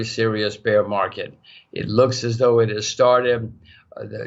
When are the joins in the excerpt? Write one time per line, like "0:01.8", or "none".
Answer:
none